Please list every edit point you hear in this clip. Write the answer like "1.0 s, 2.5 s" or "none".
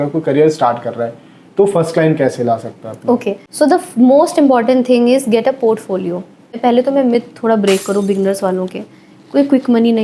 3.4 s, 6.5 s